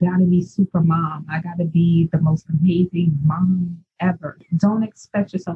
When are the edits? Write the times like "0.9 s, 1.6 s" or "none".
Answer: 4.4 s

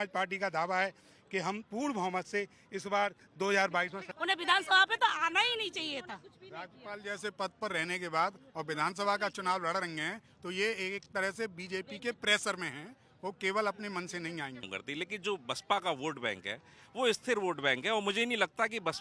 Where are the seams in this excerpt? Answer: 4.0 s, 14.8 s

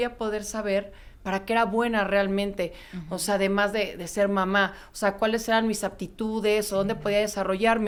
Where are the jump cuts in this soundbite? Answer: none

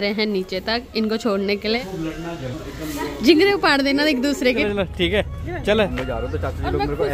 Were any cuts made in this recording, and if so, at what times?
1.8 s, 4.6 s, 5.9 s

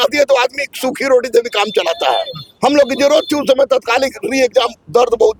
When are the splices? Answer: none

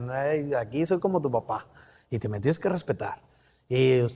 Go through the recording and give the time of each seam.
none

